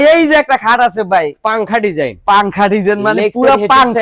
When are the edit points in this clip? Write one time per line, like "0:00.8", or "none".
none